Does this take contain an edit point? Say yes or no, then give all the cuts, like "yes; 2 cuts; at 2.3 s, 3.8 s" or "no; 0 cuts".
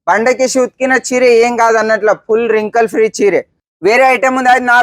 yes; 1 cut; at 3.6 s